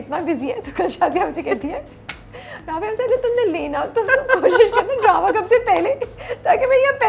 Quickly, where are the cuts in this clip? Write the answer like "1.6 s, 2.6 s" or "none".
none